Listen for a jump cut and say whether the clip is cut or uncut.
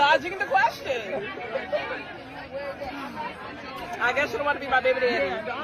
uncut